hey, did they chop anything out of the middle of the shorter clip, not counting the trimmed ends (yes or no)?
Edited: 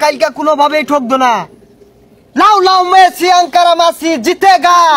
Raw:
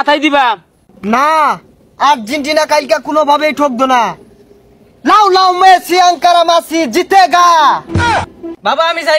no